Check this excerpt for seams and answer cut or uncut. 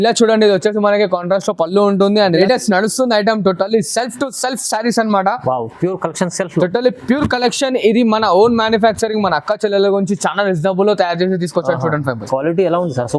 cut